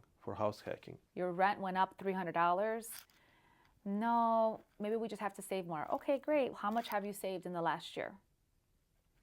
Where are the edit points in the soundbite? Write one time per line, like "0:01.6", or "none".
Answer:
0:01.1